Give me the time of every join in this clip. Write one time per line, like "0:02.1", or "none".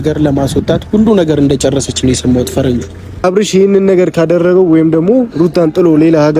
0:03.2